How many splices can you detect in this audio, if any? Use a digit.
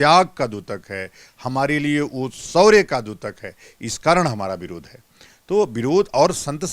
0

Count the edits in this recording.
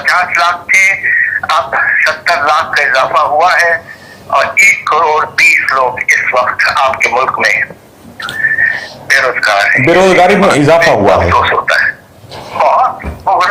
0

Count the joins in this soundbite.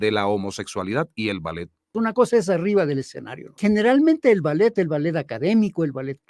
2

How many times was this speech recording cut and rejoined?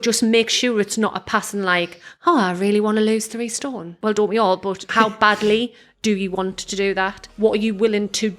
3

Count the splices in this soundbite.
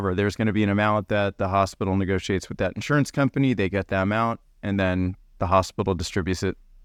0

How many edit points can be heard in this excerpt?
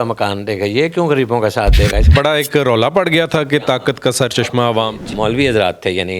2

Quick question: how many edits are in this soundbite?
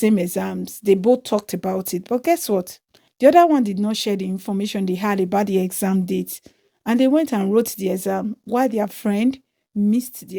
0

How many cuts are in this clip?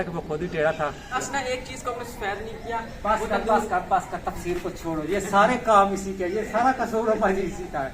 1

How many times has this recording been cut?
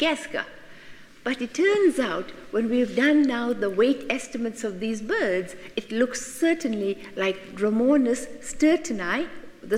1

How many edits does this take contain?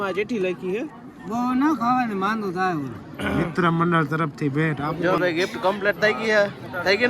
1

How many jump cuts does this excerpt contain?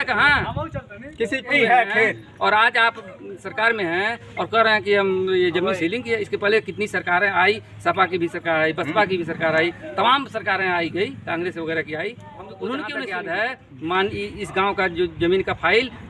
2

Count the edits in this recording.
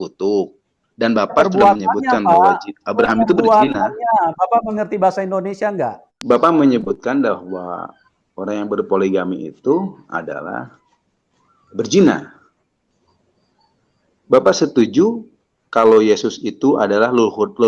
1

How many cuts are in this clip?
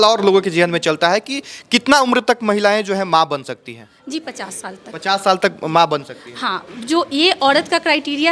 0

